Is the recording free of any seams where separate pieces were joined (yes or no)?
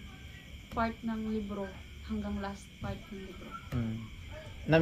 yes